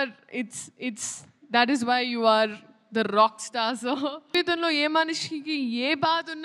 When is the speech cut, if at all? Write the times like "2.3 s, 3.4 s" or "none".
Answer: 4.3 s